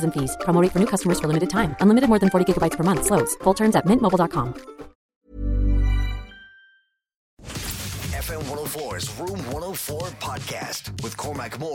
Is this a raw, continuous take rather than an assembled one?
no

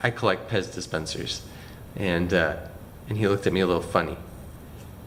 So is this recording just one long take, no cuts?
yes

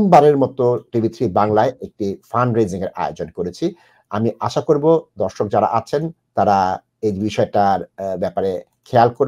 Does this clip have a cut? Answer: no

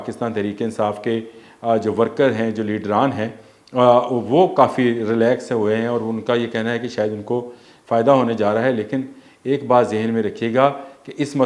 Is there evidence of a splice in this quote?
no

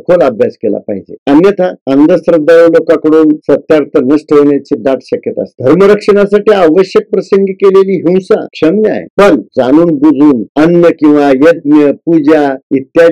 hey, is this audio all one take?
yes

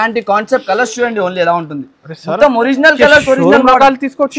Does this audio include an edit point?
no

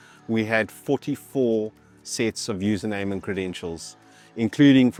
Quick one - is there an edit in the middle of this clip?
no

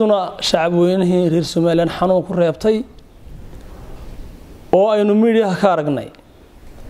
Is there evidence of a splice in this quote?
no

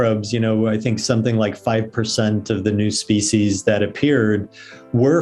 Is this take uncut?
yes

